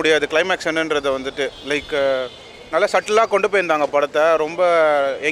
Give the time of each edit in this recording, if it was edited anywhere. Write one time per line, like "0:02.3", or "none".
none